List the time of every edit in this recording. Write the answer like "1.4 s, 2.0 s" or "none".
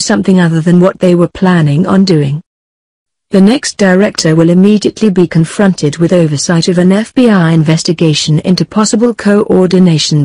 2.5 s